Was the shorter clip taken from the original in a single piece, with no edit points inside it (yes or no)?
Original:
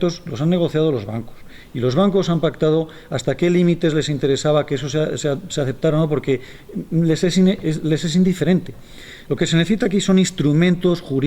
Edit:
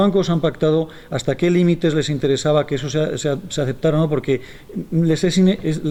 yes